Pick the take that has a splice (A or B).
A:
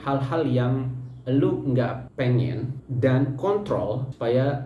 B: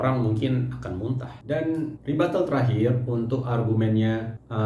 B